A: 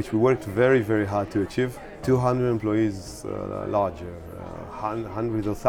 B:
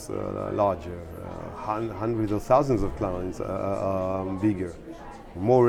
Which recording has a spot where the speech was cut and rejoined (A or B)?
A